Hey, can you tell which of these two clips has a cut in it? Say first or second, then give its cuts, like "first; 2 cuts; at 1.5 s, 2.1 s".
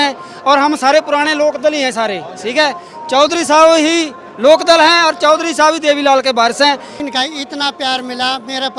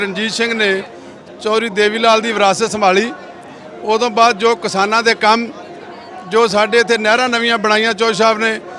first; 1 cut; at 6.9 s